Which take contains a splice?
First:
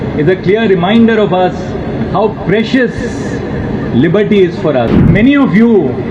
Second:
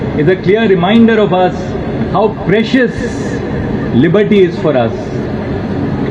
first; 1 cut; at 5.1 s

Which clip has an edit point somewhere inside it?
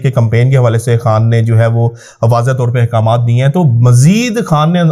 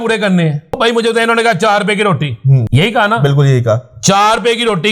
second; 2 cuts; at 0.8 s, 2.7 s

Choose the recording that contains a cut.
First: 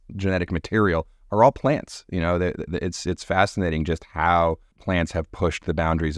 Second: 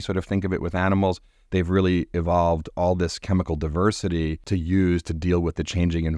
second; 1 cut; at 4.4 s

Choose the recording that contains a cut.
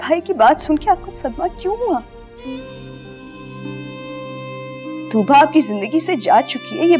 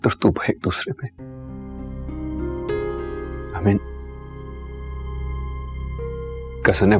first; 2 cuts; at 2.2 s, 5.1 s

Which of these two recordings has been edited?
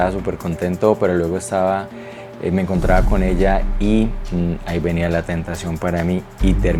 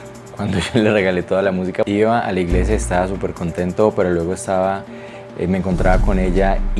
second; 1 cut; at 1.9 s

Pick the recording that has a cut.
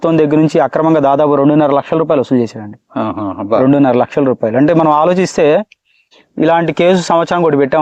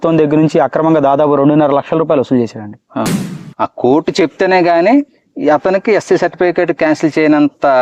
second; 1 cut; at 3.1 s

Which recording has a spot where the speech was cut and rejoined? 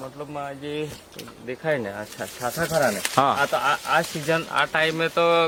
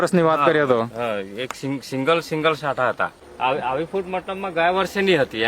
second; 1 cut; at 3.1 s

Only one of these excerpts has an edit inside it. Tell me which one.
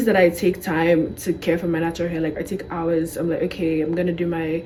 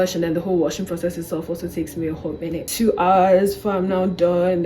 second; 1 cut; at 2.7 s

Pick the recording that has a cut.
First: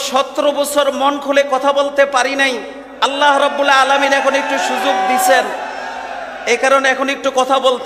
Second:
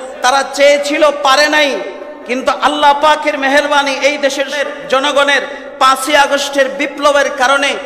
second; 1 cut; at 4.6 s

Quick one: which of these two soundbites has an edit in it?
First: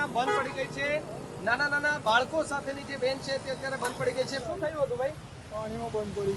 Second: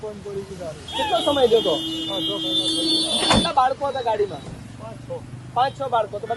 first; 1 cut; at 4.4 s

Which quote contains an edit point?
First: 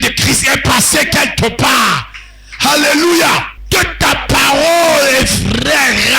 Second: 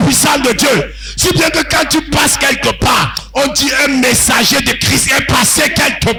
first; 1 cut; at 3.5 s

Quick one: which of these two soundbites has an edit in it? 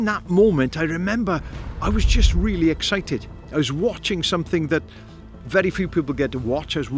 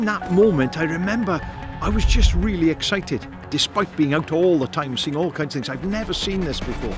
second; 1 cut; at 3.4 s

